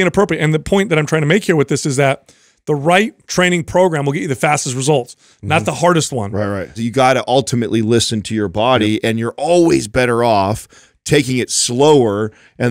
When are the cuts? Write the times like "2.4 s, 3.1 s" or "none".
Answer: 3.2 s, 6.7 s